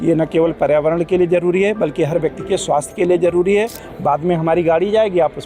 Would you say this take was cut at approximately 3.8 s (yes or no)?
yes